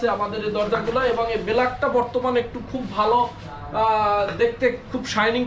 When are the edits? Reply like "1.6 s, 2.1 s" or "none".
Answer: none